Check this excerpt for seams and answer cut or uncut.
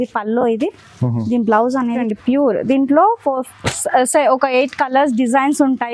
cut